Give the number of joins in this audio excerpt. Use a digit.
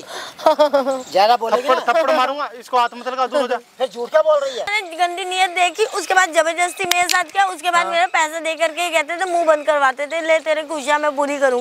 1